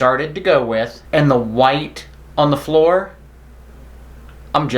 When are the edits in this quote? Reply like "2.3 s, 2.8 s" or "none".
1.0 s